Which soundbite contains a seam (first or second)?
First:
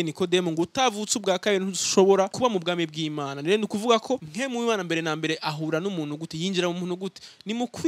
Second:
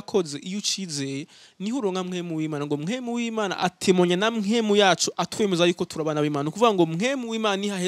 first